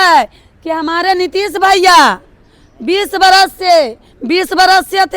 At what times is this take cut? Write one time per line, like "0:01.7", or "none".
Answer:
none